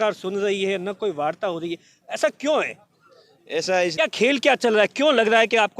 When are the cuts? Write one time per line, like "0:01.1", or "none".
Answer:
0:03.9